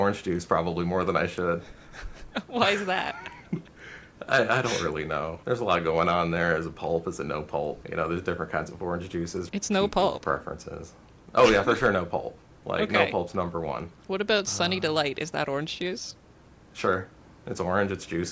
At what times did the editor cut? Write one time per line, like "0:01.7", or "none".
0:05.4
0:07.8
0:09.5
0:13.9